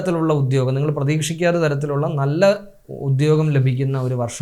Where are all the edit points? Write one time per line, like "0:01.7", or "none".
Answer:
none